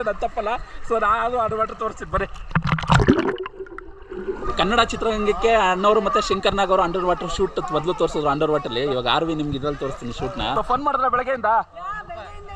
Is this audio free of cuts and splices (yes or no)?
no